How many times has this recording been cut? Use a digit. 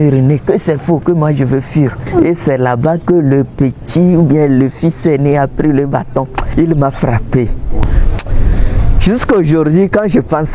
3